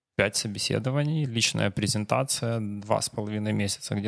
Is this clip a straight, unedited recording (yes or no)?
yes